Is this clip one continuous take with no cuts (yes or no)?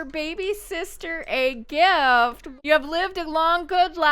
no